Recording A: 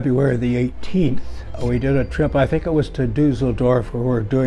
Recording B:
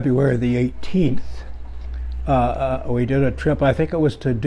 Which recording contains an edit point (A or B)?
A